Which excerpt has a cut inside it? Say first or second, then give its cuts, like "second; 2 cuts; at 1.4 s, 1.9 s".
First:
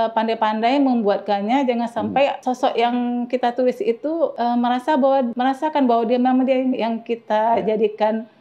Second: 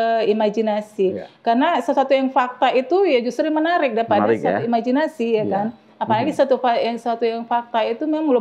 first; 3 cuts; at 2.4 s, 4.3 s, 5.3 s